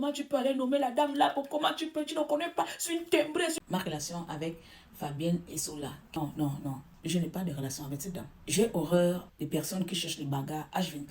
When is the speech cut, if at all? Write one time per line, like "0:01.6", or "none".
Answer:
0:03.6
0:06.1
0:06.9
0:08.3
0:09.3